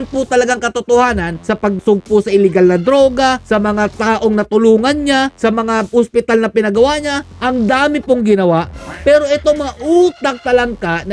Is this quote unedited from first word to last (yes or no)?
no